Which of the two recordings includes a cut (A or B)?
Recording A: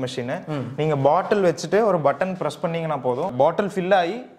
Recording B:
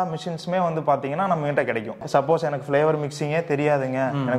B